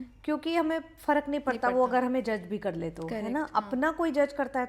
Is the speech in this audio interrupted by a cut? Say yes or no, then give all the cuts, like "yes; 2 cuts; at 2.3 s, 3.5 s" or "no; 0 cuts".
no; 0 cuts